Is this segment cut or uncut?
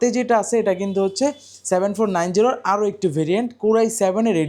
uncut